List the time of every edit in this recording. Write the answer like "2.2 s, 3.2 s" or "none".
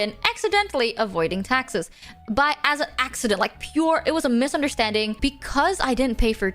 5.2 s